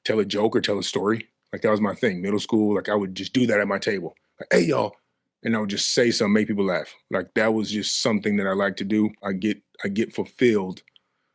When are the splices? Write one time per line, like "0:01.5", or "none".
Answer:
0:09.2